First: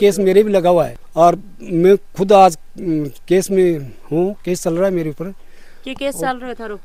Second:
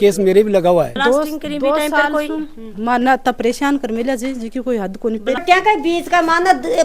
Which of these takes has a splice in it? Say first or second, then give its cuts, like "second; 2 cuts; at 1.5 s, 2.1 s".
second; 2 cuts; at 1.0 s, 5.4 s